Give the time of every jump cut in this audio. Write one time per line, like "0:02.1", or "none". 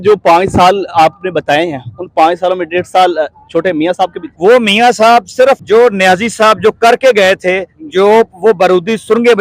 0:04.2
0:05.6